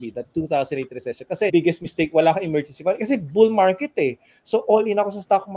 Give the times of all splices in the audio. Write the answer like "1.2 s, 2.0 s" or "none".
1.5 s